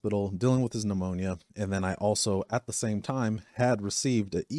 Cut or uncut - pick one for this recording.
uncut